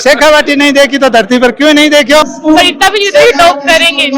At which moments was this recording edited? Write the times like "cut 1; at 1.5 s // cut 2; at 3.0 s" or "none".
cut 1; at 2.3 s